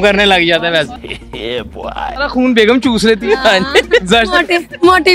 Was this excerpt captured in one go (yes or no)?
yes